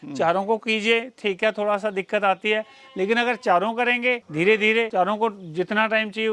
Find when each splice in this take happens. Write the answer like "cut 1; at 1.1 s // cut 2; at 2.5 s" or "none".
cut 1; at 4.3 s // cut 2; at 4.9 s

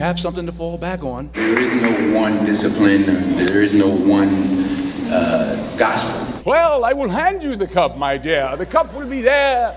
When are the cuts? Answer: cut 1; at 1.4 s // cut 2; at 6.3 s

